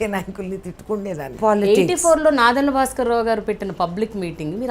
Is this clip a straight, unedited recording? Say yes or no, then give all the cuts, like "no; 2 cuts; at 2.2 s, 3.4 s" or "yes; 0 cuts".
no; 1 cut; at 1.3 s